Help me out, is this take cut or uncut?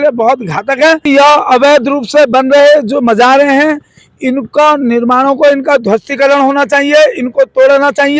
cut